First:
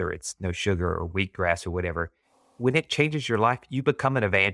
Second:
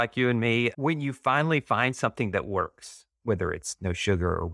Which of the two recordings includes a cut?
first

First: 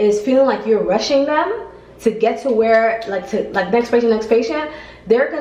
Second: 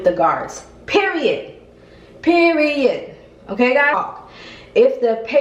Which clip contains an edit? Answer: second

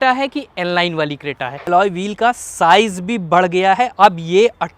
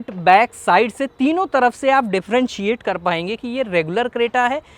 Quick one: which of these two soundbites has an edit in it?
first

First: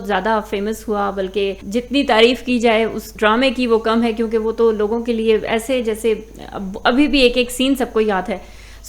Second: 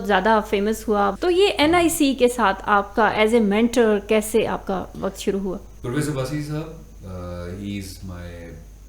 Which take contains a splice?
second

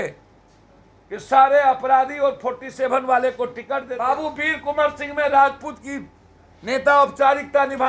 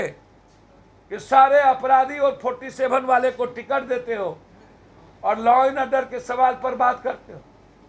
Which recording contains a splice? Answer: first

